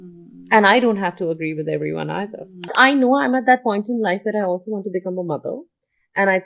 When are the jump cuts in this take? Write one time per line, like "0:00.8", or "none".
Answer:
0:02.7